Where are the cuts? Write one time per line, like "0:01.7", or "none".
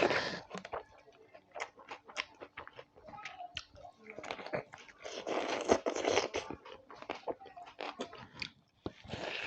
0:08.2